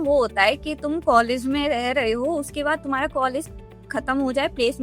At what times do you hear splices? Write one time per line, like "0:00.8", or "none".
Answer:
none